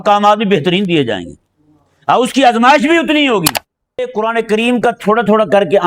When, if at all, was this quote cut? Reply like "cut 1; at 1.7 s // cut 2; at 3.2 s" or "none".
cut 1; at 4.1 s